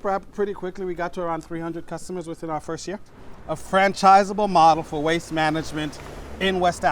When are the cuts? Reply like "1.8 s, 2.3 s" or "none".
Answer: 3.1 s